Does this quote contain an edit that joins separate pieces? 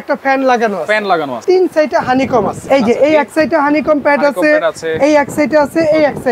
yes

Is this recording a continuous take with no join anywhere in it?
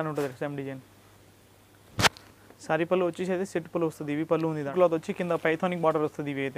no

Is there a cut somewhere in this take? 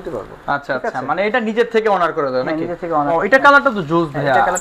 yes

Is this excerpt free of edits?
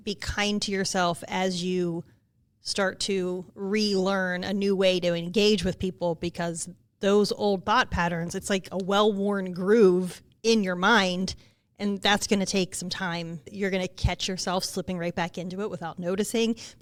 yes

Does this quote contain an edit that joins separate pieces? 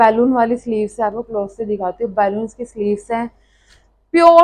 no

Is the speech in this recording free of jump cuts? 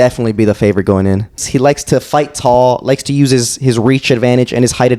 no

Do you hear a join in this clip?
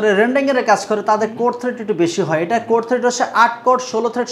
no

